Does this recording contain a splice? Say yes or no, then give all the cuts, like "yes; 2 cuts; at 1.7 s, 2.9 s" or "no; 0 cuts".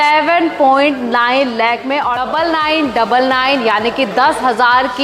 yes; 1 cut; at 2.2 s